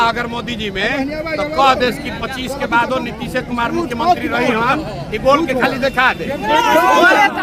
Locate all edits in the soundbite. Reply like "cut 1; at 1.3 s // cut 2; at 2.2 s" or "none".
none